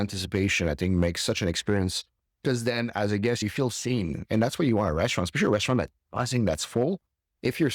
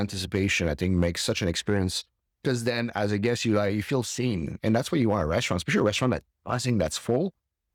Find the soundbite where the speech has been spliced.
first; 1 cut; at 3.4 s

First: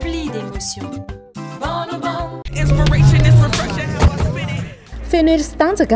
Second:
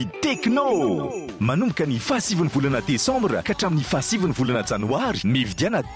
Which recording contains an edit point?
first; 1 cut; at 2.4 s

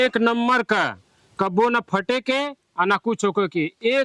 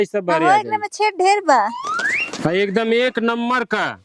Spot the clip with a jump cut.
second; 1 cut; at 1.8 s

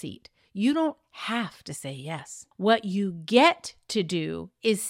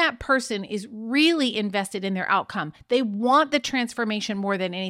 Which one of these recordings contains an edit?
first; 1 cut; at 2.4 s

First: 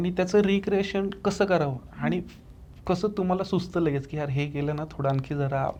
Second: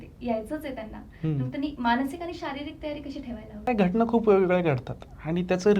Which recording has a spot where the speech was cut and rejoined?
second; 1 cut; at 3.7 s

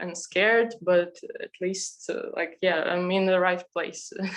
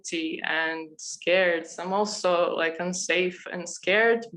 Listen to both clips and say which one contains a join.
second; 1 cut; at 1.8 s

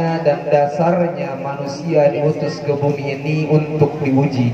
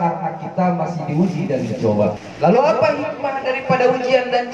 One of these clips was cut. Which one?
second; 1 cut; at 2.2 s

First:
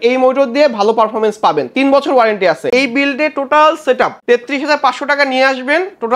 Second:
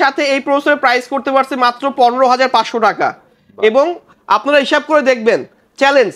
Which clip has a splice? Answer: first; 2 cuts; at 2.7 s, 4.2 s

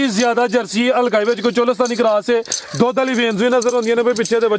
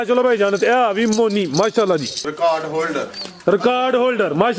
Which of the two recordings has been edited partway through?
second; 1 cut; at 2.2 s

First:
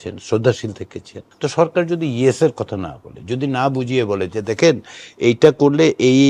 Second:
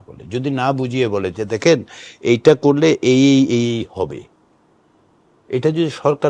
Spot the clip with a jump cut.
first; 1 cut; at 1.2 s

